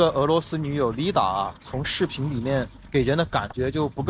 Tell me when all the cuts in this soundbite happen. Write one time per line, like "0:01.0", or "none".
0:02.8